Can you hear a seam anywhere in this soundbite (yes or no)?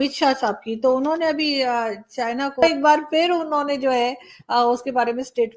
yes